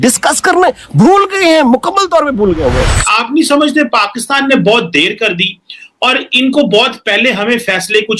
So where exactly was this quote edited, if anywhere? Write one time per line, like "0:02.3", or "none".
0:03.0